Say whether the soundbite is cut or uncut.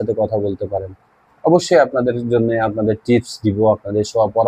uncut